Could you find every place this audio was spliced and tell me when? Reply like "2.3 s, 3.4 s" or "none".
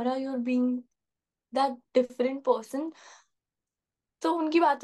none